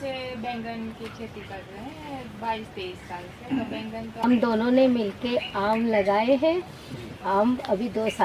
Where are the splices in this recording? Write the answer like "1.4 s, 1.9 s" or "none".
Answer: 4.2 s